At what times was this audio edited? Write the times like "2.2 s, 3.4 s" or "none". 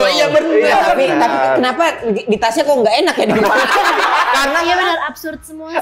4.6 s

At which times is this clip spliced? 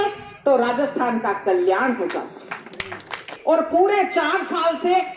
3.3 s

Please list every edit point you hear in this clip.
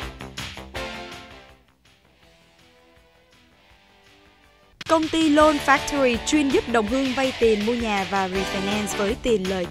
5.0 s

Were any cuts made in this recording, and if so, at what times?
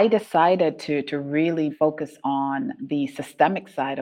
1.7 s, 2.8 s

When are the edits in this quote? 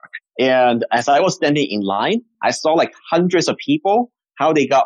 none

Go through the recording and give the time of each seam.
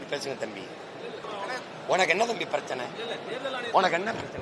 1.2 s

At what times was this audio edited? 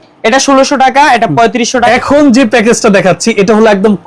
1.9 s

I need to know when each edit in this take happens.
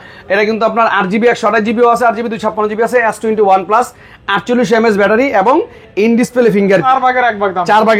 6.8 s

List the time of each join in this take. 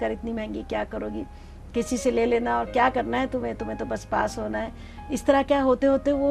none

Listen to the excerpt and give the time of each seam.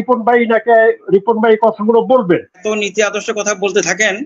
2.6 s

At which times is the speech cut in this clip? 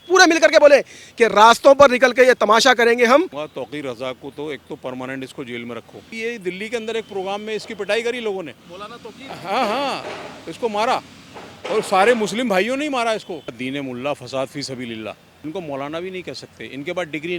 3.4 s, 6.1 s, 13.6 s, 15.3 s

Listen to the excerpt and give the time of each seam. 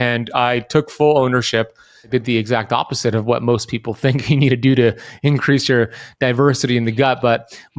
2.1 s

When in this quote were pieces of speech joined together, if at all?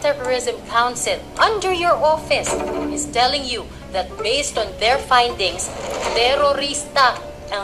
1.3 s

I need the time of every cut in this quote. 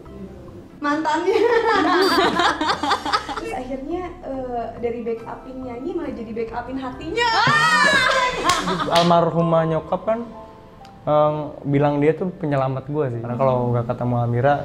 3.4 s, 8.8 s, 13.2 s

